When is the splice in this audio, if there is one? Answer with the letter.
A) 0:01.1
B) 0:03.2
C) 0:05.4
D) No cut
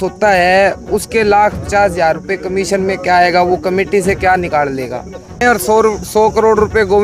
C